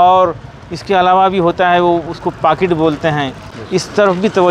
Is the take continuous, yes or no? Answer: no